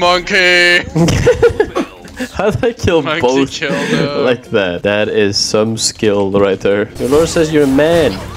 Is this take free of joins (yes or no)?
no